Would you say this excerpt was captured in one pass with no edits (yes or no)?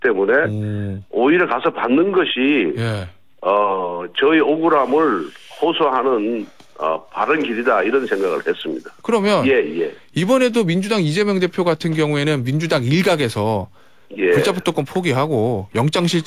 no